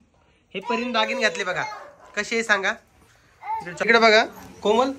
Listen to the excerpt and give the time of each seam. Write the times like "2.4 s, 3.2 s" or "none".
3.8 s